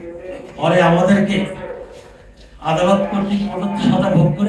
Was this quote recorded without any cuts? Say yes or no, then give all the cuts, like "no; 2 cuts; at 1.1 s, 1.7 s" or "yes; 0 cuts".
yes; 0 cuts